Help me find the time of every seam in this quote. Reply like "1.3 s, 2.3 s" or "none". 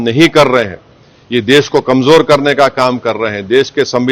none